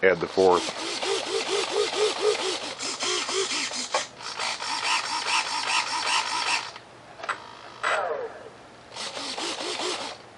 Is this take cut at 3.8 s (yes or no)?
no